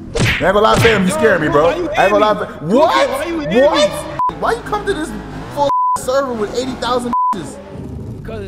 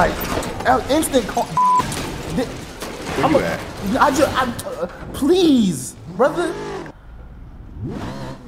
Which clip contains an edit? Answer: first; 1 cut; at 4.3 s

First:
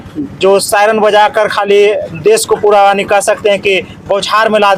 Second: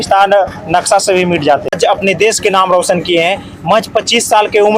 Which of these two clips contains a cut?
second; 1 cut; at 1.8 s

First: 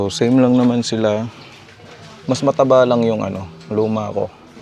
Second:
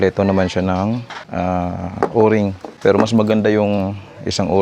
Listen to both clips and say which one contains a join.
second; 2 cuts; at 1.2 s, 2.7 s

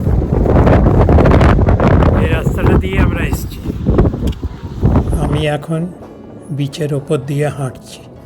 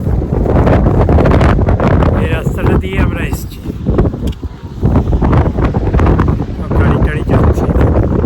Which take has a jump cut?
first; 1 cut; at 5.2 s

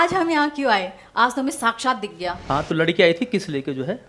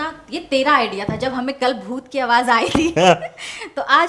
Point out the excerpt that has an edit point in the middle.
first; 1 cut; at 2.4 s

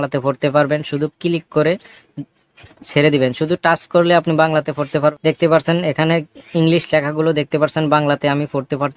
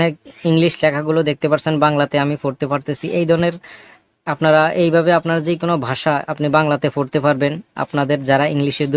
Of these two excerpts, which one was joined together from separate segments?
first; 1 cut; at 5.2 s

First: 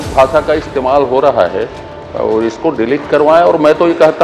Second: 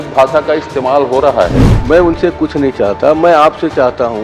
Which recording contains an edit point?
second; 1 cut; at 1.7 s

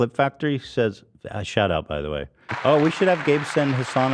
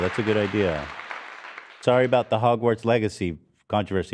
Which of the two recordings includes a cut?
first; 1 cut; at 2.4 s

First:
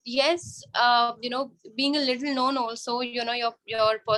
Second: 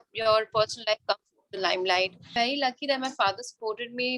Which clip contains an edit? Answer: second; 1 cut; at 2.3 s

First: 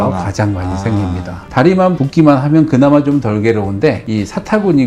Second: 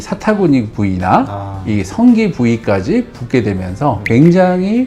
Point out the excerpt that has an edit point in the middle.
first; 1 cut; at 1.5 s

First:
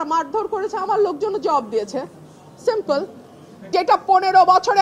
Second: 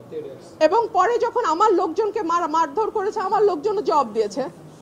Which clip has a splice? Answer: first; 1 cut; at 3.7 s

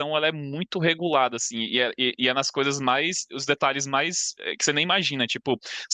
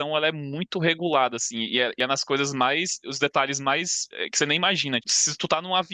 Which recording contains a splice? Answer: second; 2 cuts; at 2.0 s, 5.1 s

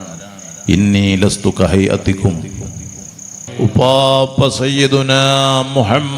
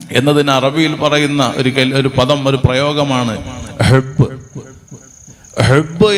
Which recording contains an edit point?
first; 1 cut; at 3.4 s

